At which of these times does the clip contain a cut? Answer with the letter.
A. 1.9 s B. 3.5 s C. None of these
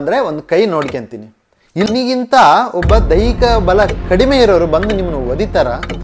A